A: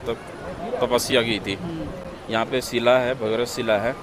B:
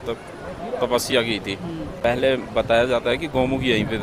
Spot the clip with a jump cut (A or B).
B